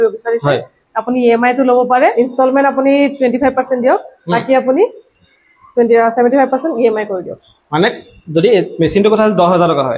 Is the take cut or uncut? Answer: uncut